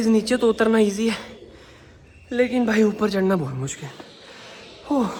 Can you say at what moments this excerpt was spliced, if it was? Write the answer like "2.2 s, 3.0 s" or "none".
none